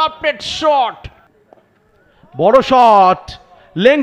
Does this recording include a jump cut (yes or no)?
yes